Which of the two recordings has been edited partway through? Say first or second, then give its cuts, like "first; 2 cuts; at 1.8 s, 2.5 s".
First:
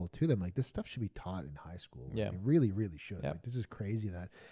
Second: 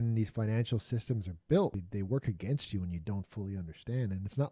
second; 1 cut; at 1.8 s